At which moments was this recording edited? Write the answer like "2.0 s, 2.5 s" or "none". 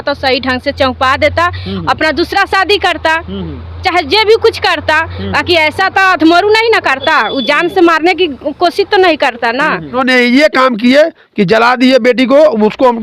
10.0 s